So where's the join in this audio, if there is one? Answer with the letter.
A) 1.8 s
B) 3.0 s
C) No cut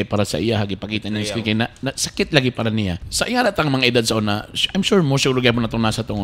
B